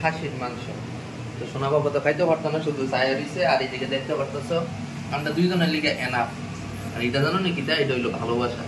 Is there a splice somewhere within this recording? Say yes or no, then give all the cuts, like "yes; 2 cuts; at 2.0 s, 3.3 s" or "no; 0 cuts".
no; 0 cuts